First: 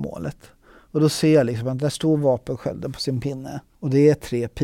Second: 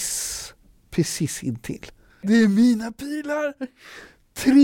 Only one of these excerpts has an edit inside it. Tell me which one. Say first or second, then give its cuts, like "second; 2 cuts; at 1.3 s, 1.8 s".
second; 1 cut; at 2.3 s